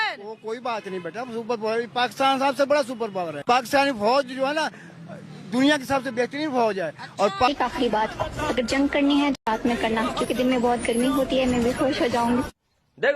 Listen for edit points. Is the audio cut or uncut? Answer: cut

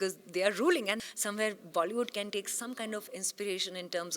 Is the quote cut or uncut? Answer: cut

